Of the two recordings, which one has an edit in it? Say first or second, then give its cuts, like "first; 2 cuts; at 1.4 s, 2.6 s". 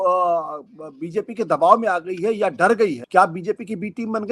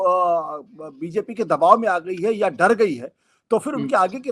first; 1 cut; at 3.0 s